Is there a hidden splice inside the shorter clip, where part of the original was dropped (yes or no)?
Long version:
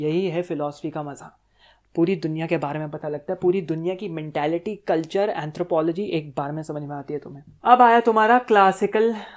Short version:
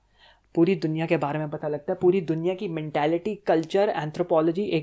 no